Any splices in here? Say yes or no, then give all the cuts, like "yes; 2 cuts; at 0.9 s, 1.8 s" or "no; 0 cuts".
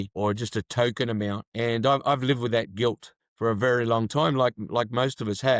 no; 0 cuts